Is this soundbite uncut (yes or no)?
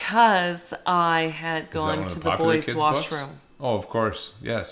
yes